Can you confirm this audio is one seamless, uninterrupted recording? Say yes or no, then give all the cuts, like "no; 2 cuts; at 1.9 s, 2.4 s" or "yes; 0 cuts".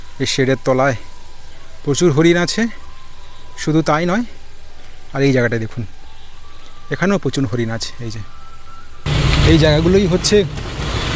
no; 1 cut; at 9.0 s